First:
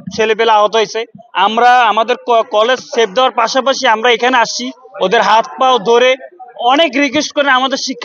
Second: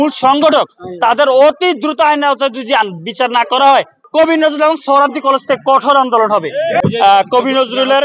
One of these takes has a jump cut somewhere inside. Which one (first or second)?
second